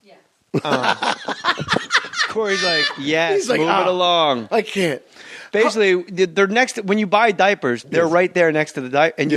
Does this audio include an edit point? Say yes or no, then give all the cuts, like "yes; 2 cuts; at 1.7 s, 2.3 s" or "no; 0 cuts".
no; 0 cuts